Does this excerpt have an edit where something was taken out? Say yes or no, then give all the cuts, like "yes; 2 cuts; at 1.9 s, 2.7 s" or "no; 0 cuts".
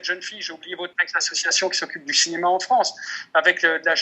yes; 1 cut; at 0.9 s